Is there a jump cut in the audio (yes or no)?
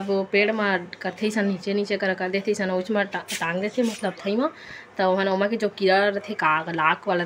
no